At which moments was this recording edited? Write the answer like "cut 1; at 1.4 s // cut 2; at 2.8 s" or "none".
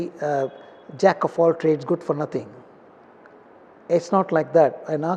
none